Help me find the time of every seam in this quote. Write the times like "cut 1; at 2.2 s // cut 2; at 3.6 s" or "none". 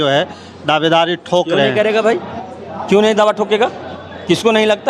none